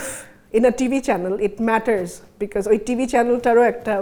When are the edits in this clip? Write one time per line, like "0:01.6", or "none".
none